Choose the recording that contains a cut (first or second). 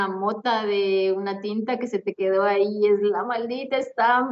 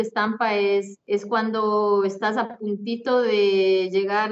second